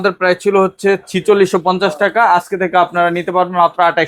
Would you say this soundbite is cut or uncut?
uncut